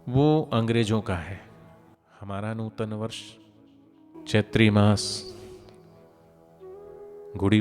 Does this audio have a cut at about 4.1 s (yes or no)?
yes